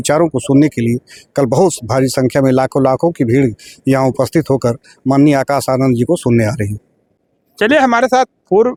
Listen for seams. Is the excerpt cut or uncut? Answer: uncut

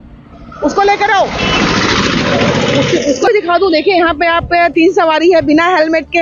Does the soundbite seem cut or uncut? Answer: uncut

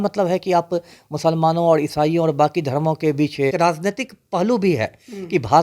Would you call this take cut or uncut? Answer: cut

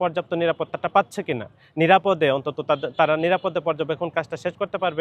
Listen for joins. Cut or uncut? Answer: cut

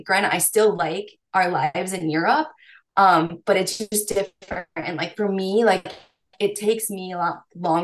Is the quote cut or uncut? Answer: uncut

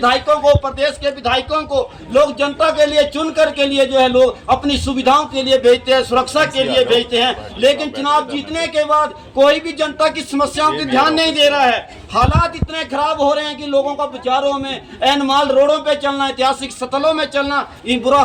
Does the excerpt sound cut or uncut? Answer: uncut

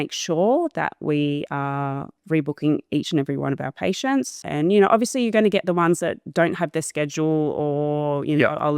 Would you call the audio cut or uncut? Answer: cut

